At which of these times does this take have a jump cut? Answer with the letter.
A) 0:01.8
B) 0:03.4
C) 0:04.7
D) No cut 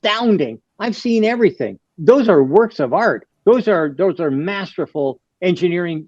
A